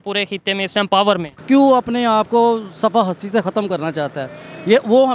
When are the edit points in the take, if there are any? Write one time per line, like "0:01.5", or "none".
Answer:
0:01.3